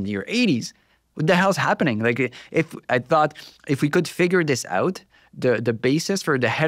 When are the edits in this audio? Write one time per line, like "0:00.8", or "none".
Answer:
none